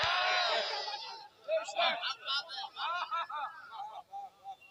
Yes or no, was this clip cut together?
no